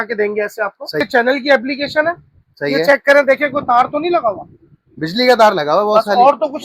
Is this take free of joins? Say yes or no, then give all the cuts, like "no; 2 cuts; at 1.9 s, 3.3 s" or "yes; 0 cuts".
no; 1 cut; at 1.0 s